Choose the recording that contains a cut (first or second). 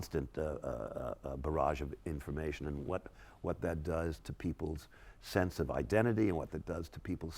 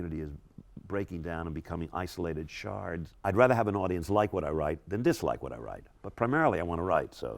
second